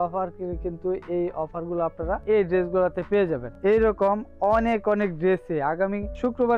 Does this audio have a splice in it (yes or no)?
yes